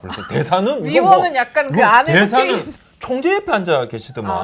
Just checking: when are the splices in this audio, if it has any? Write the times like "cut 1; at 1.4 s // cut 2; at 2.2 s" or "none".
cut 1; at 2.8 s